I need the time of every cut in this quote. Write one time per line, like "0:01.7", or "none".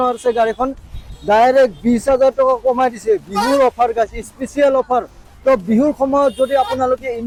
none